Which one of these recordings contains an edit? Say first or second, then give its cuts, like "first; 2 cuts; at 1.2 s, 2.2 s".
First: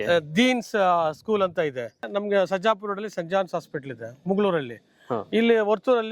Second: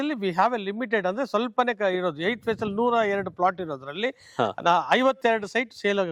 first; 1 cut; at 2.1 s